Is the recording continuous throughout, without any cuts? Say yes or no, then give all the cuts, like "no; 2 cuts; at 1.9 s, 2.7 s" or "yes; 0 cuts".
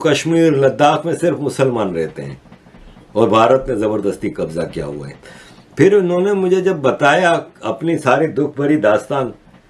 yes; 0 cuts